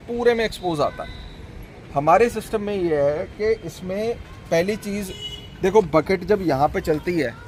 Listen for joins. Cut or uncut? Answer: uncut